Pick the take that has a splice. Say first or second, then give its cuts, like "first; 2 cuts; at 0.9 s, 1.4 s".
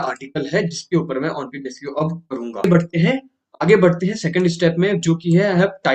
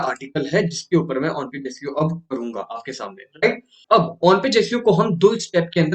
first; 1 cut; at 2.6 s